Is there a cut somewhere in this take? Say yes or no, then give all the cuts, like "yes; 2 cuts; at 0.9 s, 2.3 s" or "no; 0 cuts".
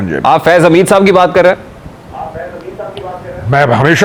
no; 0 cuts